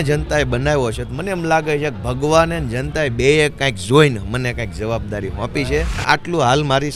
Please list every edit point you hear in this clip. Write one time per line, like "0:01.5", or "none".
0:06.0